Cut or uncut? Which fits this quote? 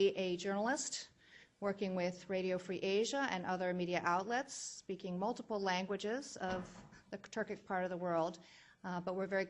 cut